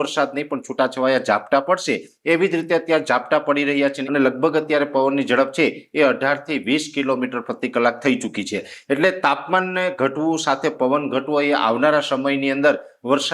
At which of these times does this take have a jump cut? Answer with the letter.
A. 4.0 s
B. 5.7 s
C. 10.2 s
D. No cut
A